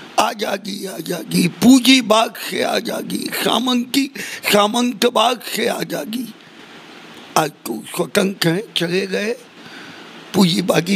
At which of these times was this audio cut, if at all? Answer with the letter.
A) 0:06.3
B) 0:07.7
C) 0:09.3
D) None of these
D